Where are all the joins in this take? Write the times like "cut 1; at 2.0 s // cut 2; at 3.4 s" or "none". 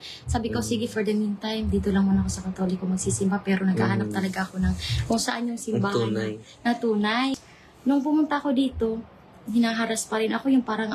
cut 1; at 7.4 s